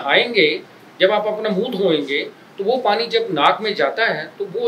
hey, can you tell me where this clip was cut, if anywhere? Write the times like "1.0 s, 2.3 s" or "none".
none